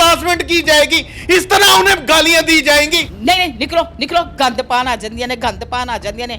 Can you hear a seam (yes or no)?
yes